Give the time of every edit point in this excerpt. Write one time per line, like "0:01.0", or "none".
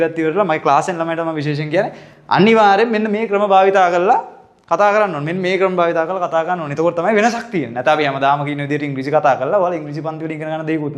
none